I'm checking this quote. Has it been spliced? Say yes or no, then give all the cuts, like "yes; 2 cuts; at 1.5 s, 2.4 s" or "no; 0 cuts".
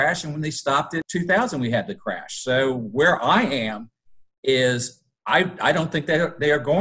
yes; 1 cut; at 1.0 s